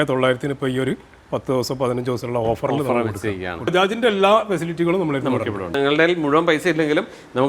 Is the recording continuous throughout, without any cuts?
no; 2 cuts; at 3.7 s, 5.7 s

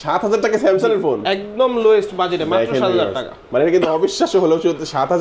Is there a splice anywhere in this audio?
no; 0 cuts

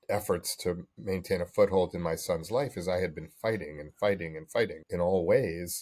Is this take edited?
yes; 1 cut; at 4.8 s

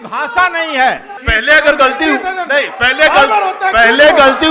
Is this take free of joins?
no; 1 cut; at 1.1 s

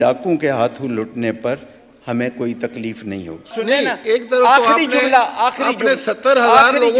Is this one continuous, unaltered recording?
no; 1 cut; at 3.6 s

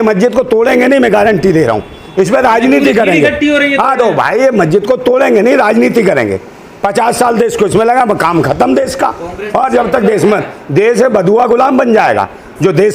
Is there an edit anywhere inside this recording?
no; 0 cuts

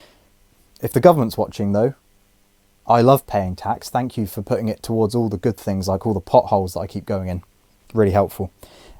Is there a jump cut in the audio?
no; 0 cuts

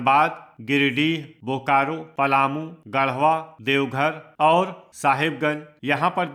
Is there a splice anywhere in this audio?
no; 0 cuts

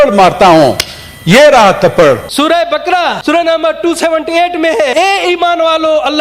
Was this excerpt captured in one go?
no; 2 cuts; at 2.6 s, 4.9 s

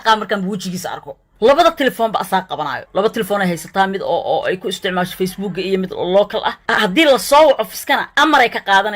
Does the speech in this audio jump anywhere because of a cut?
yes; 2 cuts; at 1.2 s, 6.6 s

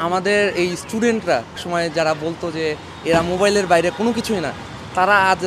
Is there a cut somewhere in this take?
yes; 1 cut; at 1.6 s

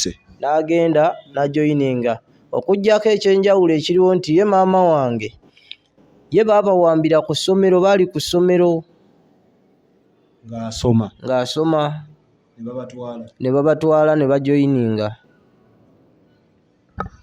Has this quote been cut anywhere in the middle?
no; 0 cuts

